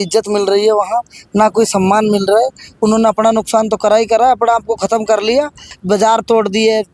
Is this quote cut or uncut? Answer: cut